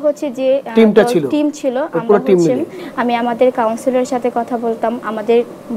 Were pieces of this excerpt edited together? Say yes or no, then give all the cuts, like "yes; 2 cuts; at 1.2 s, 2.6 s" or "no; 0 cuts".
yes; 1 cut; at 2.8 s